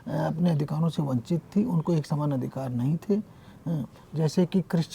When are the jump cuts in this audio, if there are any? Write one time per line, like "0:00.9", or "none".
none